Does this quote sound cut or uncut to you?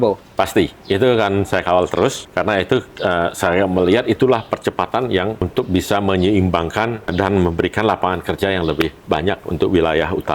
cut